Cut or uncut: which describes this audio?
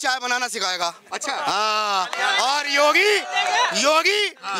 uncut